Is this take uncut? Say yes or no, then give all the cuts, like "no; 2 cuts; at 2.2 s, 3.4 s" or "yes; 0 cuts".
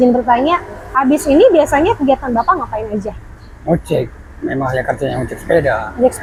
yes; 0 cuts